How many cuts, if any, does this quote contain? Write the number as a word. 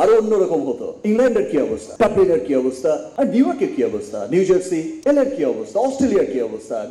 two